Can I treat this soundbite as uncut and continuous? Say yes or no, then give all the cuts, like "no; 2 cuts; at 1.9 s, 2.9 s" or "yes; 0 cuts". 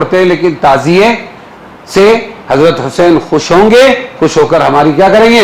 yes; 0 cuts